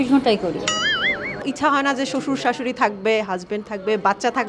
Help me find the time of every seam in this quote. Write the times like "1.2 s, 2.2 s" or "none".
1.4 s